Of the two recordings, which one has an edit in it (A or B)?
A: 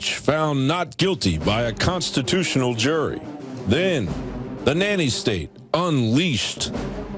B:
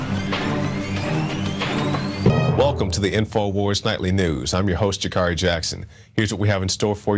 A